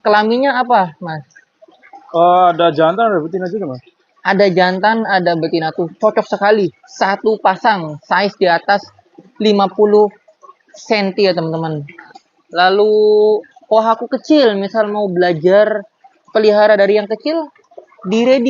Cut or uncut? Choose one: cut